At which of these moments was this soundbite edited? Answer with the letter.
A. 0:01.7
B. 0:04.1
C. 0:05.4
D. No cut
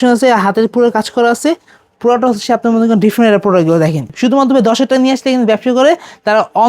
B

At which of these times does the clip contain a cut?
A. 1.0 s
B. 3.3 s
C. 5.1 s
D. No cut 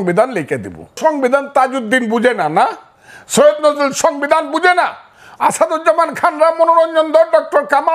A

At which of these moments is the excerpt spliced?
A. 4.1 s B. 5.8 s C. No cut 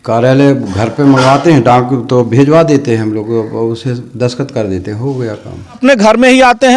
B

